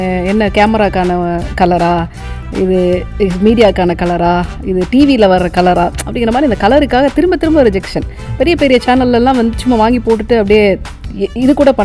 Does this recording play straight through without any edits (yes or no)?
yes